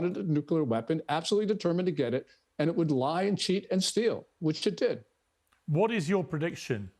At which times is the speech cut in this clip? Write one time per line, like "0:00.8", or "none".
none